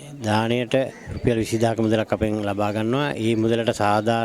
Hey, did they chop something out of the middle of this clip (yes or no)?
no